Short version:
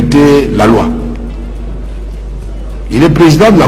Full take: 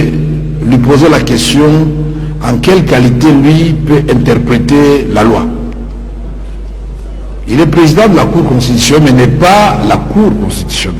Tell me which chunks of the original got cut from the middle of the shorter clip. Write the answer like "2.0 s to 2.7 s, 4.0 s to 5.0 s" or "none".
none